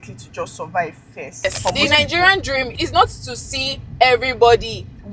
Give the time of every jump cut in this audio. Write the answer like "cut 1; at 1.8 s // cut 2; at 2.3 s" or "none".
cut 1; at 1.4 s // cut 2; at 2.8 s